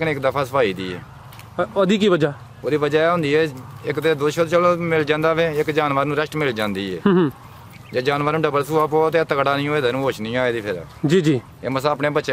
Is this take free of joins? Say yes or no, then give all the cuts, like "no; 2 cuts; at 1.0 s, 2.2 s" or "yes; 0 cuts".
yes; 0 cuts